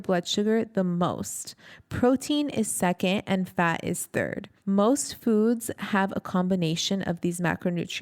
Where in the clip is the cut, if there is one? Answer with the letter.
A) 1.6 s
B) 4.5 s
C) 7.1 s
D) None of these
B